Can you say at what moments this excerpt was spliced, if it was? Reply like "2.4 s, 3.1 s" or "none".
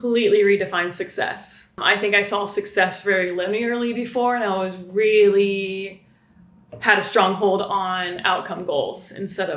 1.8 s